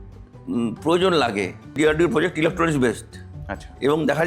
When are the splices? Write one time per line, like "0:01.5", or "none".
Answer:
0:01.8